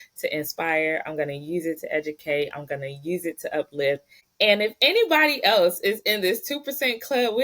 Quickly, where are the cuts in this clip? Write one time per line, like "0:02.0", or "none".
0:04.2

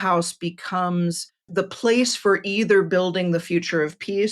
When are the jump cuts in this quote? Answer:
0:01.3

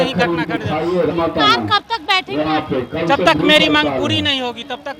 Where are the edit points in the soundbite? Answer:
0:01.1

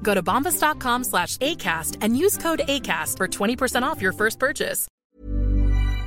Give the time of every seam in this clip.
0:04.8

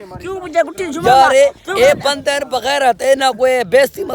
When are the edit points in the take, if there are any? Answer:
none

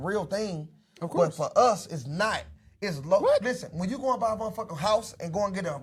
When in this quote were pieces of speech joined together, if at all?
none

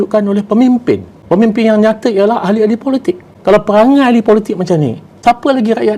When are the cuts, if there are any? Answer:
0:01.1
0:03.3
0:05.0

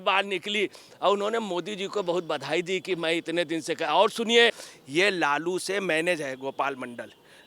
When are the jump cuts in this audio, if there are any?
0:04.7

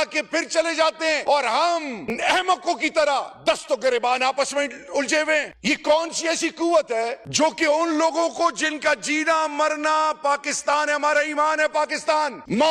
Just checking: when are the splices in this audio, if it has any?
0:01.2
0:05.5

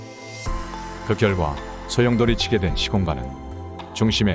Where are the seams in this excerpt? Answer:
0:01.1

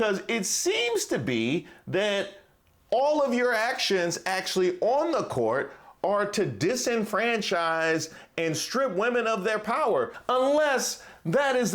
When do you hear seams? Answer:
0:10.2

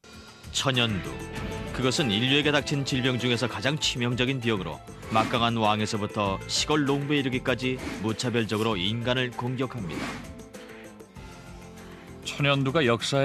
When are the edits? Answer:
0:01.8

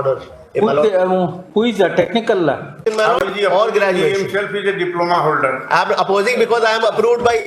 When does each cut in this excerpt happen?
0:02.8

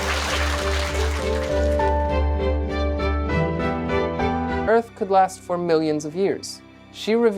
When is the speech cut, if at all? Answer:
0:04.6

